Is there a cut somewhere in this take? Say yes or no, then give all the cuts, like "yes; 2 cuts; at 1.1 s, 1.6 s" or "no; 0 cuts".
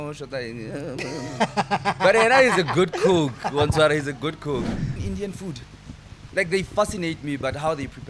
yes; 1 cut; at 4.9 s